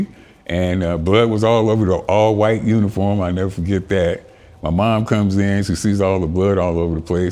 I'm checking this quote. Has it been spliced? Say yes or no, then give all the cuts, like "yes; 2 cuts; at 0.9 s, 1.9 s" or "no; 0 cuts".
no; 0 cuts